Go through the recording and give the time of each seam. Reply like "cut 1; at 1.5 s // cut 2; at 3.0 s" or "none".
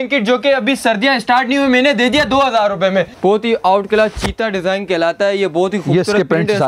cut 1; at 3.1 s